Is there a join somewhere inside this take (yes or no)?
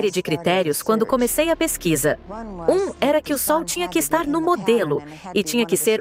no